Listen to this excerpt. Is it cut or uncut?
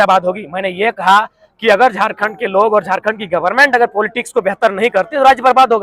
uncut